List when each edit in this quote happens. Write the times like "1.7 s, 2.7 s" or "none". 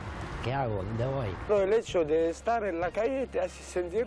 1.5 s